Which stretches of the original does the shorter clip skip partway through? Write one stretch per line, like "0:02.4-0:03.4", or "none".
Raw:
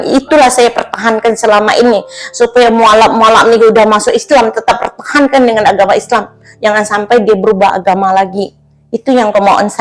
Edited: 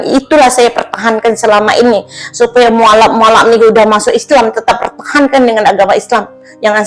none